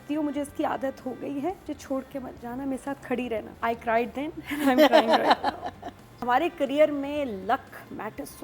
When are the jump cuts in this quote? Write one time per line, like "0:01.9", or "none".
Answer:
0:01.6
0:03.5
0:06.2